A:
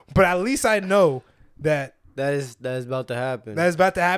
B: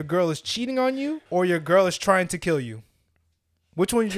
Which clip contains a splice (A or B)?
B